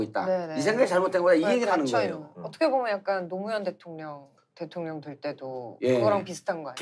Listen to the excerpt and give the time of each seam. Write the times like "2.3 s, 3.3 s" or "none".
1.1 s